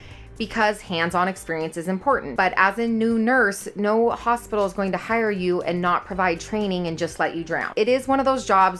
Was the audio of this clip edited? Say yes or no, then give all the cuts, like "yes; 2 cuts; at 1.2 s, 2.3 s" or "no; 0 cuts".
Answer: yes; 2 cuts; at 2.3 s, 7.7 s